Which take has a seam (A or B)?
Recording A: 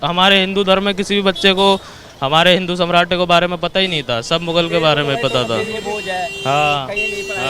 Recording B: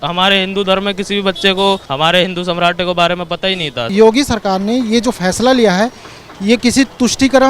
B